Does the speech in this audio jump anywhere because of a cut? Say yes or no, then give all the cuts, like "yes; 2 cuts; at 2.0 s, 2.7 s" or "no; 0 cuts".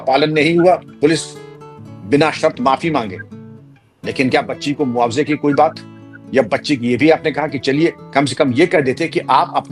no; 0 cuts